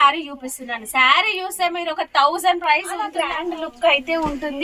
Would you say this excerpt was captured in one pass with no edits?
no; 1 cut; at 3.2 s

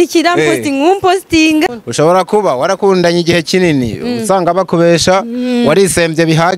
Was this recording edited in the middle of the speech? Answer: yes; 1 cut; at 1.7 s

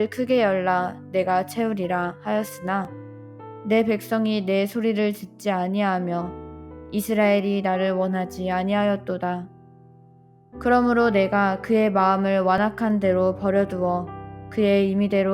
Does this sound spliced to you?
no; 0 cuts

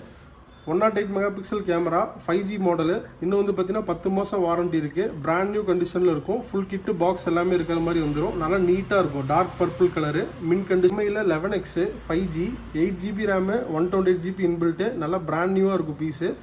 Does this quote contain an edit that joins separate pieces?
yes; 1 cut; at 10.9 s

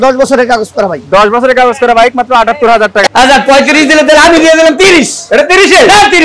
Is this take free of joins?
no; 1 cut; at 3.0 s

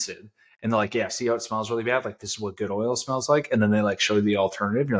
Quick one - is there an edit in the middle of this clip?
no; 0 cuts

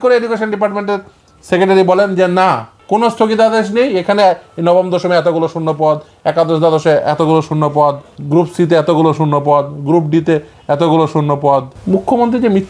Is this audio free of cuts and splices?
no; 3 cuts; at 2.7 s, 8.1 s, 11.7 s

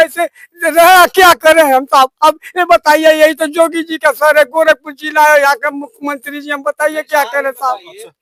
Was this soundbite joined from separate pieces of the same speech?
no; 0 cuts

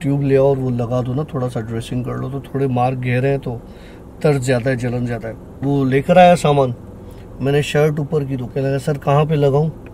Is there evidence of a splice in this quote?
yes; 2 cuts; at 5.5 s, 8.5 s

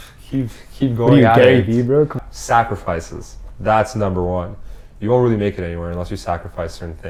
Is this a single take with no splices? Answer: yes; 0 cuts

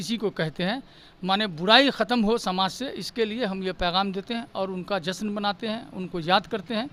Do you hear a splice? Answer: no; 0 cuts

